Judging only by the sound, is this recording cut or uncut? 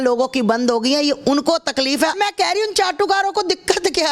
cut